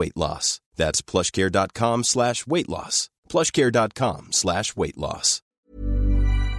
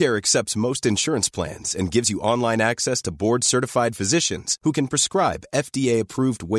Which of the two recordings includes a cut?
first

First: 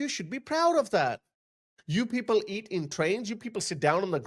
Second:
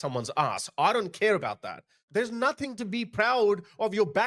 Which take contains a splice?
second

